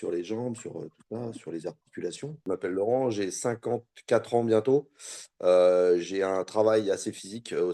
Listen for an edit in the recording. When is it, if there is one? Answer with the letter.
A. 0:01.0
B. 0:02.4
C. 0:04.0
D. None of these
B